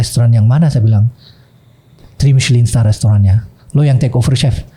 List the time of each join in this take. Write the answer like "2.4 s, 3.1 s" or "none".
none